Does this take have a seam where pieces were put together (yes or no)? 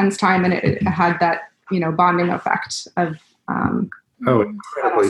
no